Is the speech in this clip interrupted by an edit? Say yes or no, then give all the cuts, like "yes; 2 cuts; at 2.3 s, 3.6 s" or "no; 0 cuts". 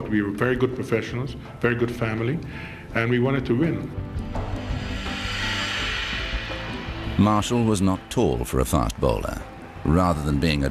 no; 0 cuts